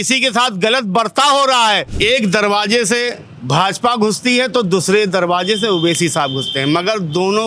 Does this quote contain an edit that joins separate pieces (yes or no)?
yes